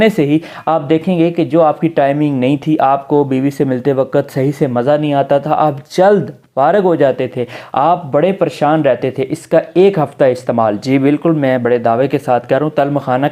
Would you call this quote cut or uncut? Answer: uncut